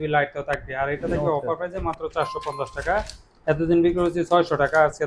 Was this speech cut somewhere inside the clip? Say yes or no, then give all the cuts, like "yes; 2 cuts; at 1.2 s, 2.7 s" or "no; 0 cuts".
no; 0 cuts